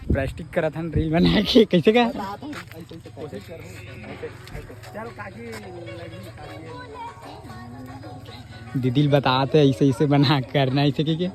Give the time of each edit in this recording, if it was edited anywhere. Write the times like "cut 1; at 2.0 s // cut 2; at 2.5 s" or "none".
none